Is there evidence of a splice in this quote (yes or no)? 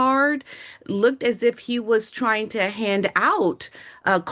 no